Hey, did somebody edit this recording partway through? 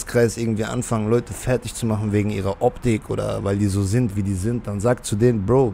no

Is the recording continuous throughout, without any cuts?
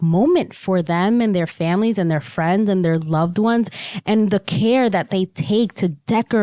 yes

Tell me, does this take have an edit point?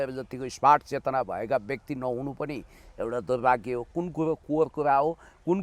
no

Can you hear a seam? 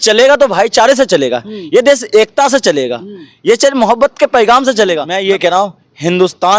yes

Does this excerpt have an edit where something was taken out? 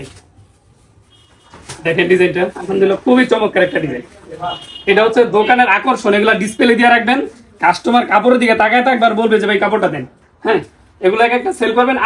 no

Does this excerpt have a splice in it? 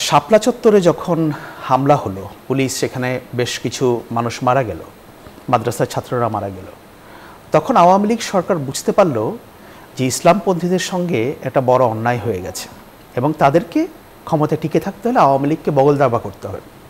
no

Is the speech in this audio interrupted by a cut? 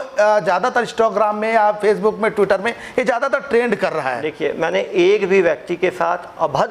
no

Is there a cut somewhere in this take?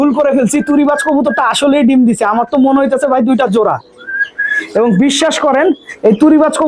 no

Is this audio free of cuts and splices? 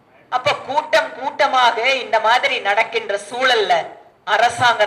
yes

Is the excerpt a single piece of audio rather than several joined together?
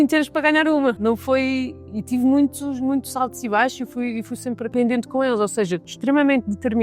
no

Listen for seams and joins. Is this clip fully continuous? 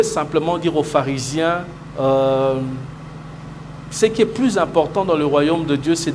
yes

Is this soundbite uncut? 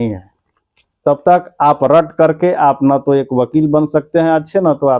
yes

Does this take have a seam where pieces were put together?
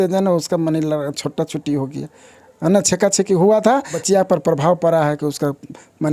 yes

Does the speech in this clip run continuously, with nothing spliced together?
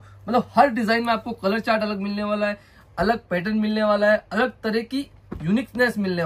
yes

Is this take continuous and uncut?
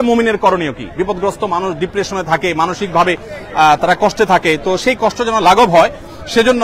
yes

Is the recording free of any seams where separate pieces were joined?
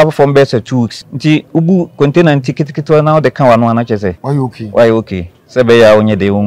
no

